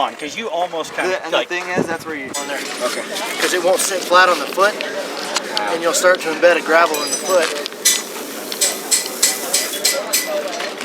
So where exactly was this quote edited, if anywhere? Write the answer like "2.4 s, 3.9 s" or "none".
2.3 s